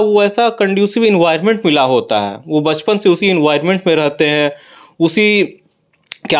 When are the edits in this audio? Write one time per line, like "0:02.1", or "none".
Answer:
none